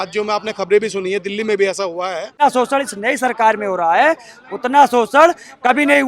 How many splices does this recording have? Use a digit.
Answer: 1